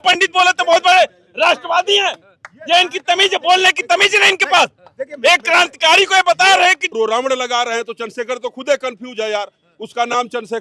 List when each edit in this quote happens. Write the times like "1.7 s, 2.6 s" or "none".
6.9 s